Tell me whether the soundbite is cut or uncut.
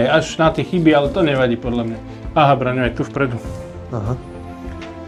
uncut